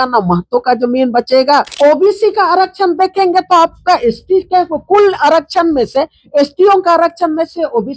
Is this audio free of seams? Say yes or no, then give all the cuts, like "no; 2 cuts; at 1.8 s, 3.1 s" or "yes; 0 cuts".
no; 1 cut; at 1.7 s